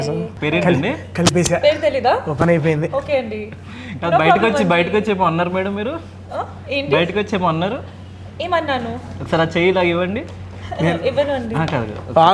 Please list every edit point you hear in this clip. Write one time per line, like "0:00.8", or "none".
none